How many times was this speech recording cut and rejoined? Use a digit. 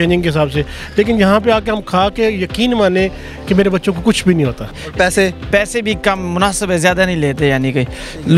1